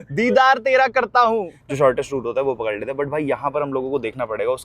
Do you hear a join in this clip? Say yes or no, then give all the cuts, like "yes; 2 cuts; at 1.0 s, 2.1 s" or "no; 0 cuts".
yes; 1 cut; at 1.5 s